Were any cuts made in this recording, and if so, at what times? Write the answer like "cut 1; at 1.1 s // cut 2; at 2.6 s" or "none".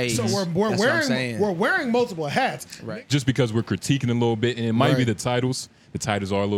cut 1; at 2.7 s